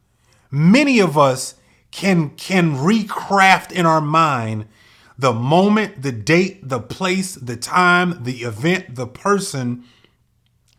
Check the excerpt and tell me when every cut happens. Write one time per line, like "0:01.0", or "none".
none

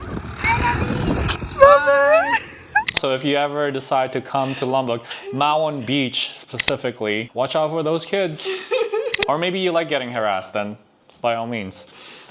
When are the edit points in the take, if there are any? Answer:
0:02.9
0:07.3

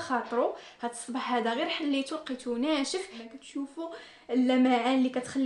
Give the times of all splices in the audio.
0:03.2

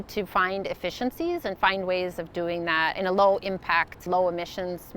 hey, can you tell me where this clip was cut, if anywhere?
0:03.0
0:04.0

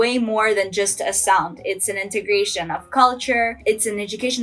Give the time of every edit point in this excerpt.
none

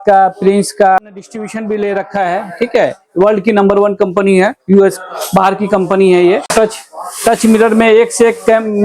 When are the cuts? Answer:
0:01.0
0:06.5

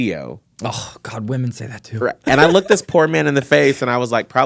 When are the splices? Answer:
none

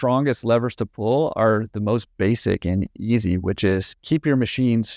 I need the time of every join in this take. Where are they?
0:04.0

